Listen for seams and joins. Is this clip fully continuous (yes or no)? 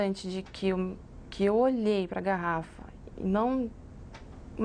yes